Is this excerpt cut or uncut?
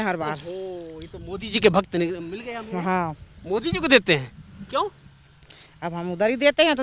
uncut